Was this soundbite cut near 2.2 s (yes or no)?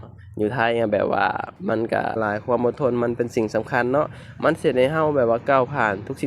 yes